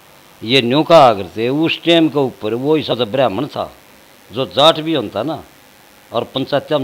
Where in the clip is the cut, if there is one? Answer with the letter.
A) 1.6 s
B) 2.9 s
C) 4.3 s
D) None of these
B